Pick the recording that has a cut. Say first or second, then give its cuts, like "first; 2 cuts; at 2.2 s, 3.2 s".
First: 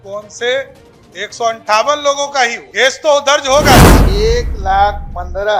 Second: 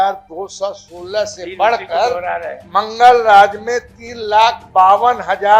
first; 2 cuts; at 2.6 s, 4.0 s